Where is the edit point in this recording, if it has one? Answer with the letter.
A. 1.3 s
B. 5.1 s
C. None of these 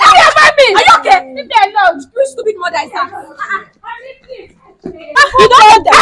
B